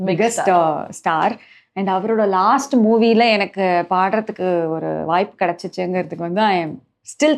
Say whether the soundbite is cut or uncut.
uncut